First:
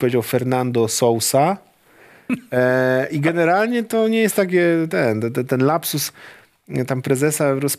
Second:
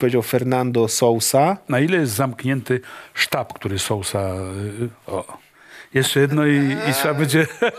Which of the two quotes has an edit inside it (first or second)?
second